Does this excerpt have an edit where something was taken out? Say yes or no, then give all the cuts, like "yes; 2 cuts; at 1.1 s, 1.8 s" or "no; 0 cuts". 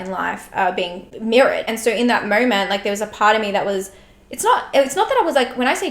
yes; 2 cuts; at 1.1 s, 1.7 s